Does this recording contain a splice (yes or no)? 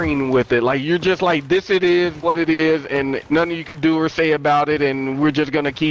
yes